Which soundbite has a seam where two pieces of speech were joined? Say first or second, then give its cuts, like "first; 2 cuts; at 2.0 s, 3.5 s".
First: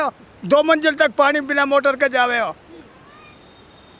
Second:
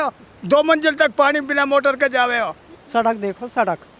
second; 1 cut; at 2.7 s